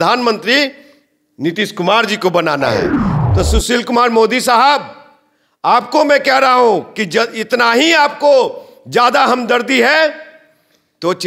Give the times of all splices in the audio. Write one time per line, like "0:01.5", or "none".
0:03.1